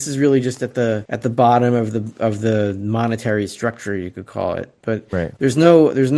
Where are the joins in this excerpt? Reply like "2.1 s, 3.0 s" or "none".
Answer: 1.1 s